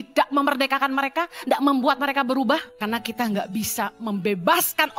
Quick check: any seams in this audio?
yes; 1 cut; at 2.7 s

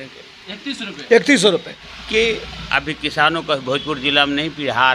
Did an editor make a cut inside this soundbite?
yes; 1 cut; at 1.8 s

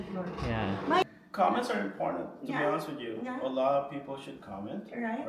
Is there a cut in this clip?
yes; 1 cut; at 1.0 s

